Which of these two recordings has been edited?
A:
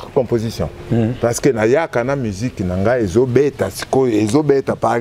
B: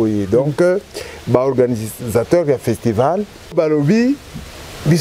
B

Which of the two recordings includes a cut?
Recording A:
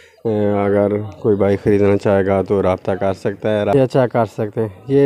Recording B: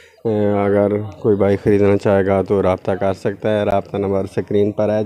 A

